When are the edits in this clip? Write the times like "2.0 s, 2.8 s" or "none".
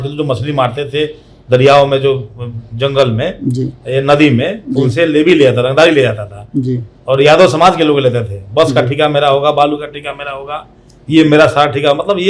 none